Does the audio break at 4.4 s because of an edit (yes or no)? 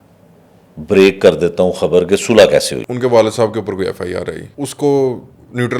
yes